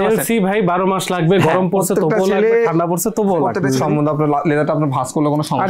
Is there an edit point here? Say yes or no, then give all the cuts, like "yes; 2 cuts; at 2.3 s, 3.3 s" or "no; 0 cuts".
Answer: yes; 1 cut; at 3.6 s